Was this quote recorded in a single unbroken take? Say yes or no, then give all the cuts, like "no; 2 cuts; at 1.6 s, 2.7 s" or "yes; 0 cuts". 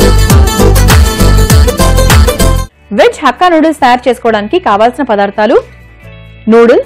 no; 1 cut; at 2.6 s